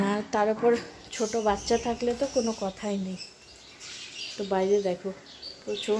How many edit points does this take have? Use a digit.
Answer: 0